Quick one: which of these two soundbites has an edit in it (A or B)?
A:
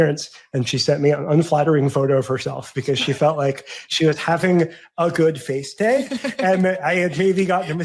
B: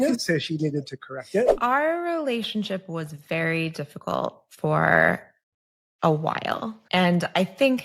B